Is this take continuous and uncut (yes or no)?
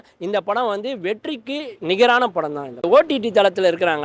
yes